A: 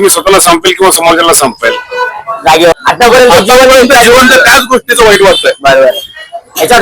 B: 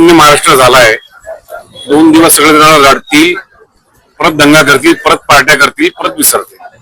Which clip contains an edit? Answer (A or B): A